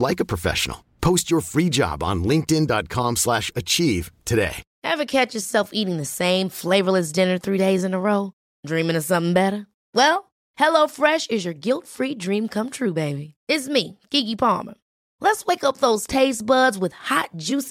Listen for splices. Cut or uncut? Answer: cut